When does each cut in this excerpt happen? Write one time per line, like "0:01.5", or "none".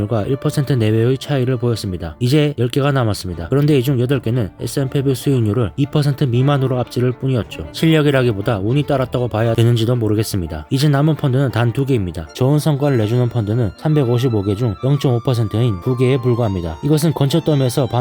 0:12.3